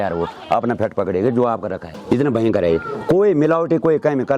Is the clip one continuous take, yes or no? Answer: no